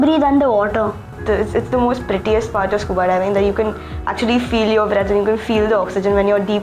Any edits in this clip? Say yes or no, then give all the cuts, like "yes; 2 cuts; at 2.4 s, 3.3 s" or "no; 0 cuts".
yes; 1 cut; at 1.2 s